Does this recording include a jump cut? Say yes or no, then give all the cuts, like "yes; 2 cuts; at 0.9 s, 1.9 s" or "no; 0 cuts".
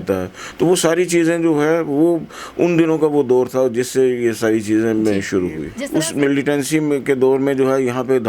yes; 1 cut; at 5.7 s